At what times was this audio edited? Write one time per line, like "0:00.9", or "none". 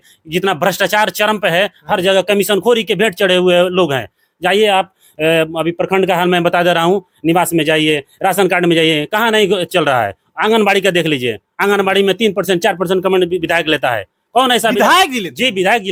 none